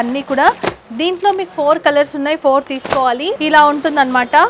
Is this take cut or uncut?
cut